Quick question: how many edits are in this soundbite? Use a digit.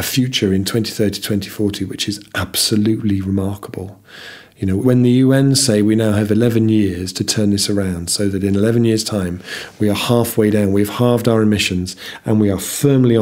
1